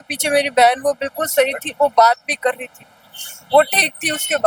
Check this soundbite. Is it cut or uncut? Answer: uncut